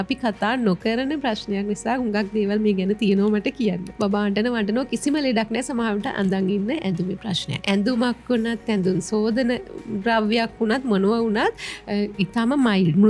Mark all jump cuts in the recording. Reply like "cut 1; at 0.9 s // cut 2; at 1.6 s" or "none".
cut 1; at 3.9 s // cut 2; at 7.6 s

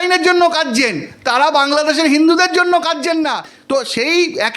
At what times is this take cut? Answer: cut 1; at 3.5 s

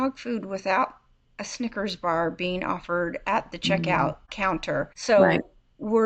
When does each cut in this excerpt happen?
cut 1; at 4.7 s

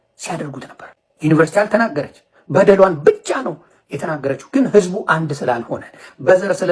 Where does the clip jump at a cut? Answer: none

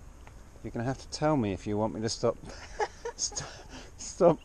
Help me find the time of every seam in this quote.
none

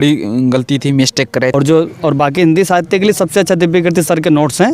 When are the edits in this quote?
cut 1; at 1.5 s

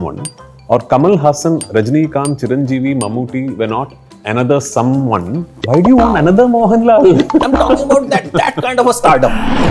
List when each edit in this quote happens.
cut 1; at 5.5 s

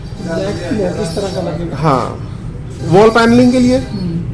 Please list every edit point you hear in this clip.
cut 1; at 2.7 s

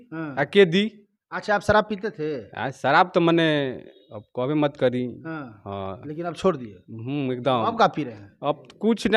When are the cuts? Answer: none

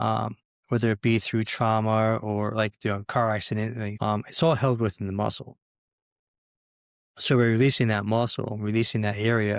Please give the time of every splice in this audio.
cut 1; at 3.9 s

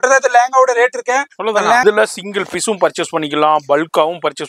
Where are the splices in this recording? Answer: cut 1; at 1.8 s

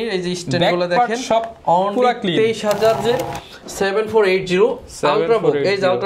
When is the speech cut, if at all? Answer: cut 1; at 3.0 s

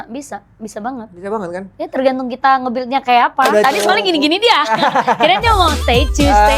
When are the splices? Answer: cut 1; at 3.5 s

